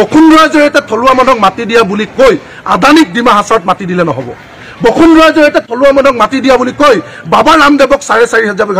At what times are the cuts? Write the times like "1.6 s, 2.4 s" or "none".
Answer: none